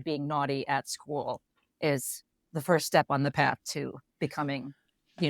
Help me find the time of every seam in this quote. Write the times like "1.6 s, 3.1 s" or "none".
2.4 s